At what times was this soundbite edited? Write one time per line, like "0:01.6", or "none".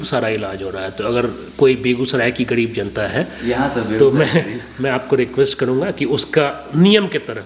none